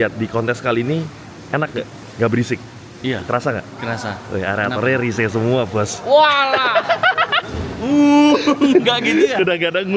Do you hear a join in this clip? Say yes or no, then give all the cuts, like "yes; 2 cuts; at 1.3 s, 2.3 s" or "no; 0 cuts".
no; 0 cuts